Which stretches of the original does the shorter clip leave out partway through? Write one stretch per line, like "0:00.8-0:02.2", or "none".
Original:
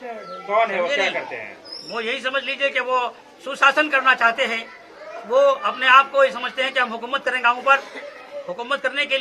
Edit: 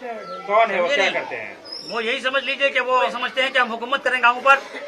0:03.2-0:06.4

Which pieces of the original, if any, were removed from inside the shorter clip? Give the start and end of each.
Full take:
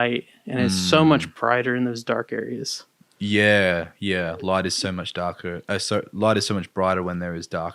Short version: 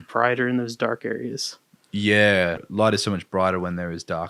0:03.9-0:06.1

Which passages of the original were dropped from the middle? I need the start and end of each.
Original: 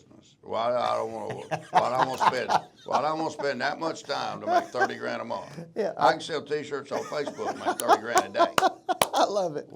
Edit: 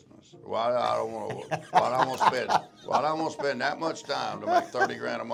none

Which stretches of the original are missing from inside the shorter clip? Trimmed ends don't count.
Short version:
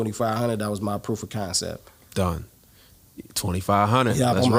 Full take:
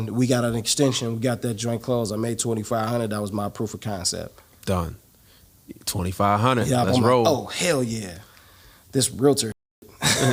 none

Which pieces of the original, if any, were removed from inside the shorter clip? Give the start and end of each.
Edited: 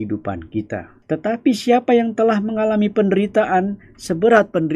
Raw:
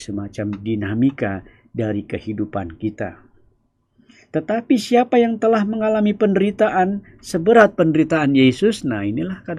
0:03.2-0:04.2

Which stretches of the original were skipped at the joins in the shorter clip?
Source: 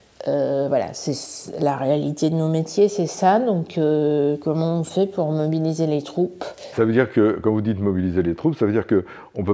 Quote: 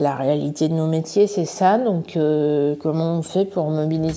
none

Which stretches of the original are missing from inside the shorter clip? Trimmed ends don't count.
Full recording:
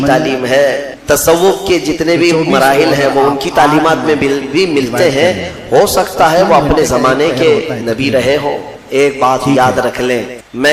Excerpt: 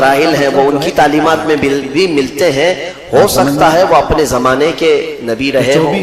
none

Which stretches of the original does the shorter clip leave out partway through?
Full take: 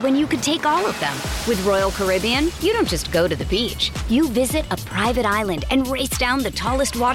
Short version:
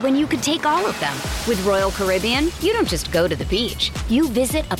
none

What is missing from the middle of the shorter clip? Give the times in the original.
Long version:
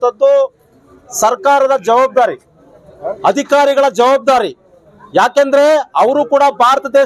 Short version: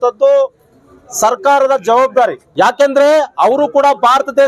0:02.4-0:05.0

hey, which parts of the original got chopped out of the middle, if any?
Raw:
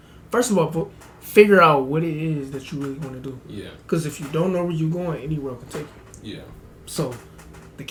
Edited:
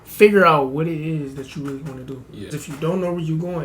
0:03.7-0:04.0

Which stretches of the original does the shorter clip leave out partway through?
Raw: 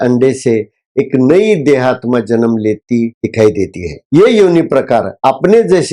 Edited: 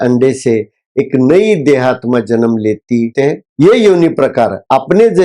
0:03.2-0:03.8

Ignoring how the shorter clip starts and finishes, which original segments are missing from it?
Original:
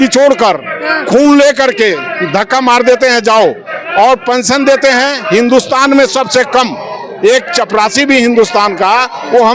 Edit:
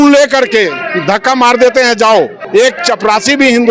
0:03.6-0:07.1

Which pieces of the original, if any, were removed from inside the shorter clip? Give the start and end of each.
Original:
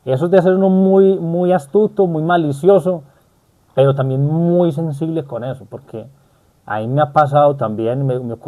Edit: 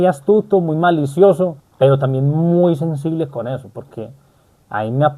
0:03.1-0:03.6

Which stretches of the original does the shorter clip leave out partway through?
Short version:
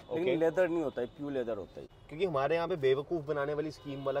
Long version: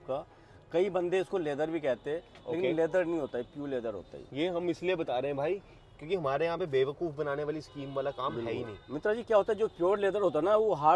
0:04.2-0:05.7

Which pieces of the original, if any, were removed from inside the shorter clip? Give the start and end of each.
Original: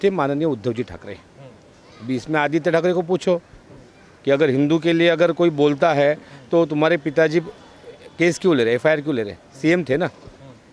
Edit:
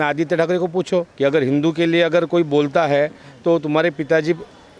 0:03.5-0:04.2

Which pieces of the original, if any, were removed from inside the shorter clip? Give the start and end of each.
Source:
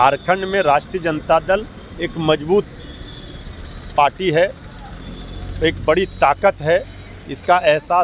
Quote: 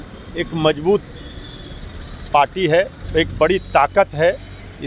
0:04.6-0:05.5

